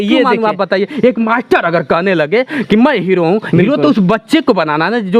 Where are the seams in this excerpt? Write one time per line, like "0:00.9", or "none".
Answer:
none